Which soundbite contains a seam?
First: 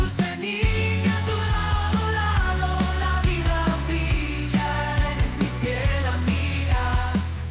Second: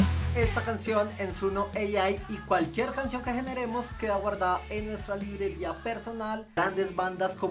second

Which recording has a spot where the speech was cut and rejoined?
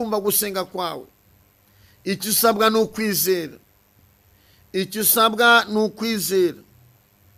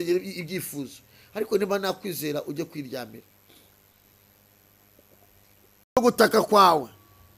second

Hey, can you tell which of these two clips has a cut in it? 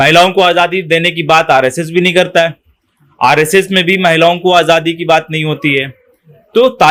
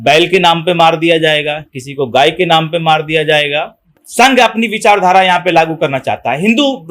second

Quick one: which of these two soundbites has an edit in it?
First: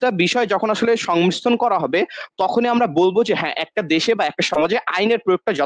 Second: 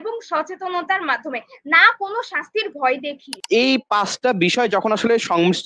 second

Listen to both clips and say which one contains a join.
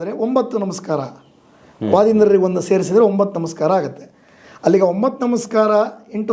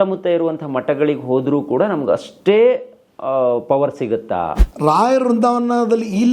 second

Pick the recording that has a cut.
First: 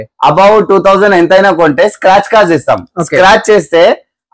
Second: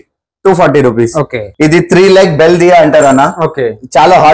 second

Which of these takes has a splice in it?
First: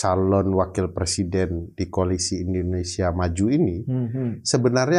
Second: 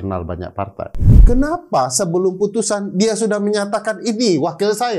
second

